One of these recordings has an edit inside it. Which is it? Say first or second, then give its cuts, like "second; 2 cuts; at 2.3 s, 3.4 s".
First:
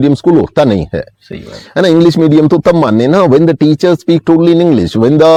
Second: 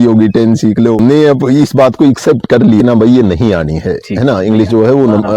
second; 2 cuts; at 1.0 s, 2.8 s